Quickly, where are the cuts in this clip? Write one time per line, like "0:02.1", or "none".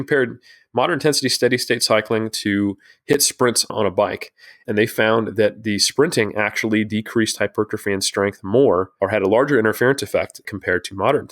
0:03.6
0:08.9
0:10.5